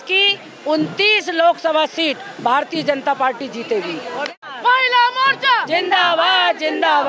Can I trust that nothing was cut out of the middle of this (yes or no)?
no